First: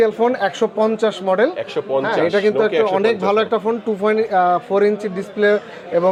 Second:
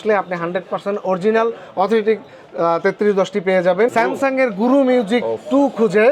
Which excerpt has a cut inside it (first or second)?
second